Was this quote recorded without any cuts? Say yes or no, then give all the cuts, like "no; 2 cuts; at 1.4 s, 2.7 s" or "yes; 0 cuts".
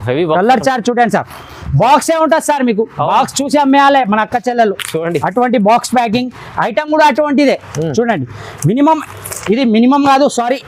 yes; 0 cuts